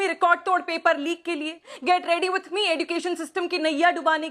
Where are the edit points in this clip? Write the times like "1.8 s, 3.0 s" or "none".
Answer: none